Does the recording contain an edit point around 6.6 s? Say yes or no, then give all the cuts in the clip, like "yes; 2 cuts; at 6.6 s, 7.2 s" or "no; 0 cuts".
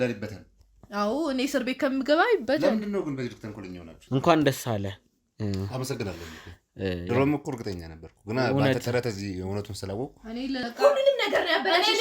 no; 2 cuts; at 3.9 s, 10.6 s